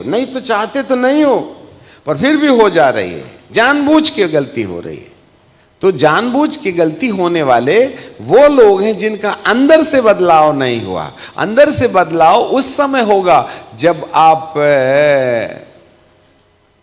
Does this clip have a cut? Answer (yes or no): no